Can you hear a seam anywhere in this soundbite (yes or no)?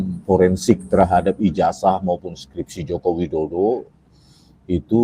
no